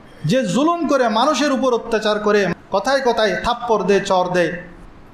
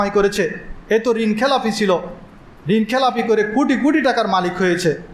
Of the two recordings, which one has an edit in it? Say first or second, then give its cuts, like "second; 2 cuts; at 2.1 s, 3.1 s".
first; 1 cut; at 2.5 s